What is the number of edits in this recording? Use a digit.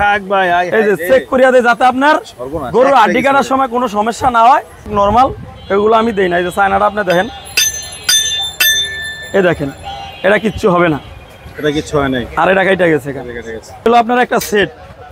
2